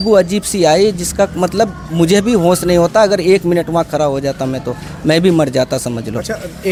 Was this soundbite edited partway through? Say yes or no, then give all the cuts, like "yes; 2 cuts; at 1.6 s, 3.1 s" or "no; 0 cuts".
no; 0 cuts